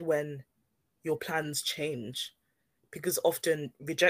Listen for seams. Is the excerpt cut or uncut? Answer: uncut